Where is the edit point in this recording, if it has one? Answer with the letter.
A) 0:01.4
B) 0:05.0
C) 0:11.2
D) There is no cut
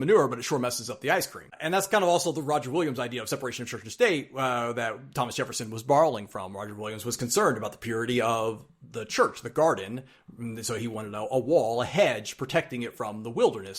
A